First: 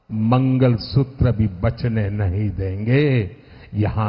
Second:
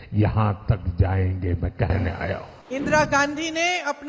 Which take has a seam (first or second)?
second